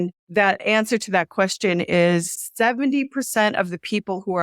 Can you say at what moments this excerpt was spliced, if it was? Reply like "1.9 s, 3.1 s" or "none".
2.3 s